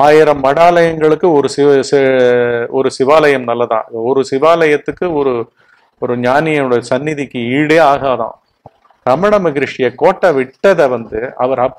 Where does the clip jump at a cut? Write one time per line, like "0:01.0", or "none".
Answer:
0:08.6